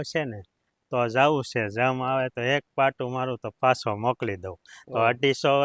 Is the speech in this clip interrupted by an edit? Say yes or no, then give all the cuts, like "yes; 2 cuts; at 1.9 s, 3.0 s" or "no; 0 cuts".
no; 0 cuts